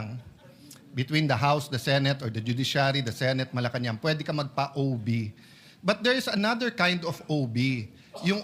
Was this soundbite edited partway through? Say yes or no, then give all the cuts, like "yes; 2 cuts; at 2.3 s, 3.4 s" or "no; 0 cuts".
no; 0 cuts